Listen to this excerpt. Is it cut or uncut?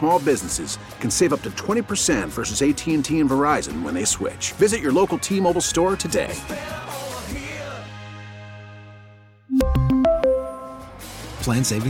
uncut